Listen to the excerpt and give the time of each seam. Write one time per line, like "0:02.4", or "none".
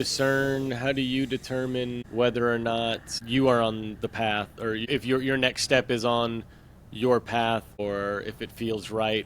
0:02.0
0:03.1
0:04.9
0:07.8

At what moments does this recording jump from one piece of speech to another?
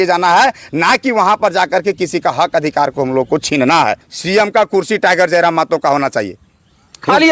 0:04.1

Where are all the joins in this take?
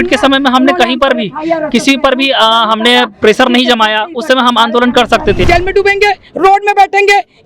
0:05.4

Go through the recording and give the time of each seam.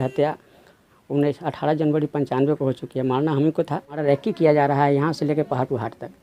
0:04.0

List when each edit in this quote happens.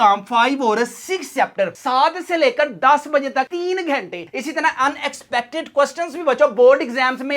0:04.3

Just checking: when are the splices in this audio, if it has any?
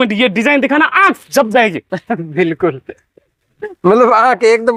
none

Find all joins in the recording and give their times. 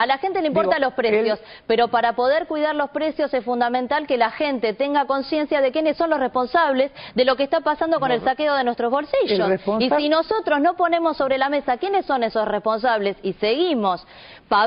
none

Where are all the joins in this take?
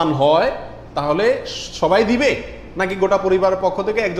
none

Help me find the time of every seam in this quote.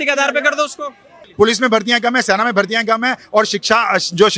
0:01.2

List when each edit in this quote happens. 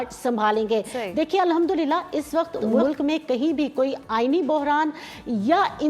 none

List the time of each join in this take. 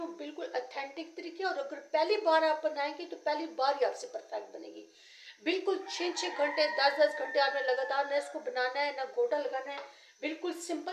none

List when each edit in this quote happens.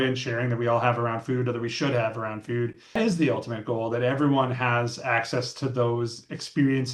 0:03.0

